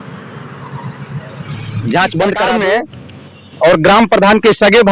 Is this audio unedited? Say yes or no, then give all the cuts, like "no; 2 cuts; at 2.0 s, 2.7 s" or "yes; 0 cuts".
no; 1 cut; at 2.5 s